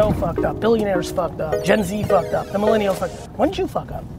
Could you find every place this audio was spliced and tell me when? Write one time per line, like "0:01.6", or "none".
0:01.5